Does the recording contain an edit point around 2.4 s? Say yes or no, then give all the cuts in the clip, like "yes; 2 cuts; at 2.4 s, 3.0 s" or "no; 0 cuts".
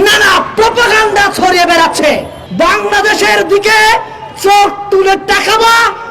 yes; 1 cut; at 2.4 s